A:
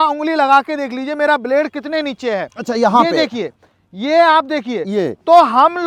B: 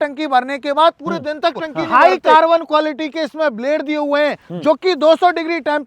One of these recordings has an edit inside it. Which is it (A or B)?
B